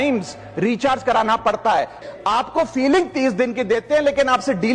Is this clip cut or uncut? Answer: cut